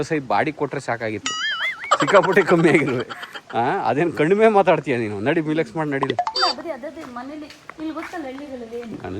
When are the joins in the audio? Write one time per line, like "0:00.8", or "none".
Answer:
0:06.3